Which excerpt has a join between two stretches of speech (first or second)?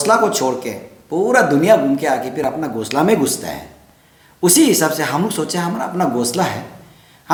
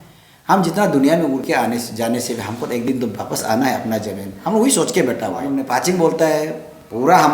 second